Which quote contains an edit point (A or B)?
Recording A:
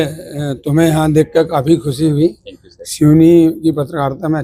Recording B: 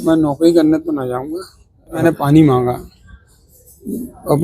B